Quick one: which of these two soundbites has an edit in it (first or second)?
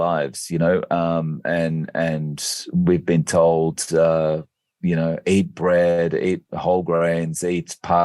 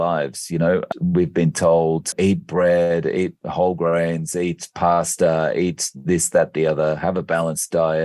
second